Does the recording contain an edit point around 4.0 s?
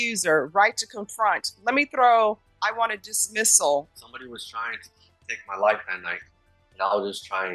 yes; 1 cut; at 4.0 s

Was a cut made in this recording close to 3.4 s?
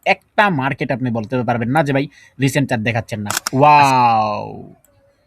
yes; 1 cut; at 3.4 s

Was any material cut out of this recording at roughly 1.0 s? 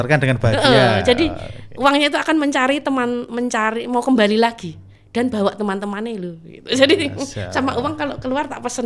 no; 0 cuts

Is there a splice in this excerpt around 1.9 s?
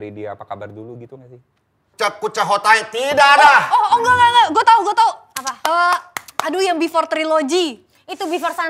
yes; 1 cut; at 1.9 s

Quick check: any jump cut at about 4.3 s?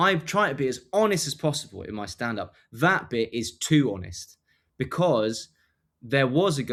no; 0 cuts

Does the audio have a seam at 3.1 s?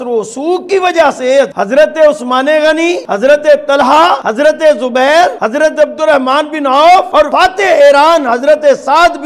yes; 4 cuts; at 3.1 s, 4.2 s, 5.4 s, 7.2 s

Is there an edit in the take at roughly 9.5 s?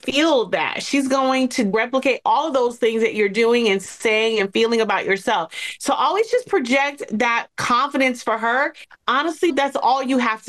yes; 2 cuts; at 1.7 s, 9.5 s

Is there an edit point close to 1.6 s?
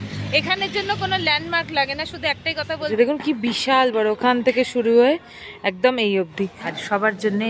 no; 2 cuts; at 2.9 s, 6.6 s

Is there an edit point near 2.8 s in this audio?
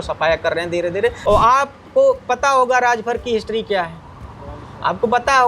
no; 1 cut; at 1.2 s

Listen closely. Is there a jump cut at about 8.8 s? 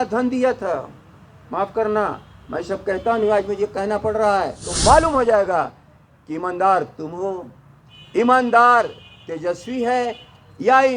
no; 1 cut; at 4.6 s

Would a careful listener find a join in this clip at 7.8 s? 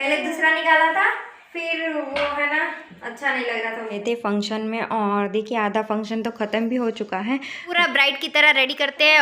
yes; 2 cuts; at 4.0 s, 7.8 s

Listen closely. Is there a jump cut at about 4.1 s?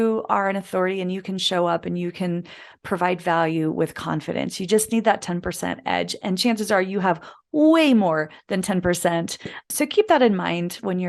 no; 1 cut; at 9.7 s

